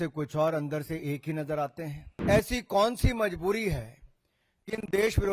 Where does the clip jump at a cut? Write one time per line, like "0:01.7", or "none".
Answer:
0:02.0